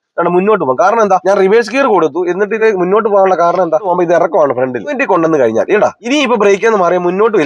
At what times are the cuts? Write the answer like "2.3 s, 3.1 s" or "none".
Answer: 1.2 s, 2.6 s, 3.9 s, 5.0 s, 6.0 s